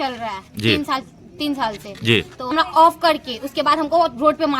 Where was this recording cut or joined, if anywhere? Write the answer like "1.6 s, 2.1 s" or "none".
2.5 s